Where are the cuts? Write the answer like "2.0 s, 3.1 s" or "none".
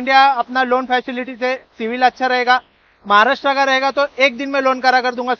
none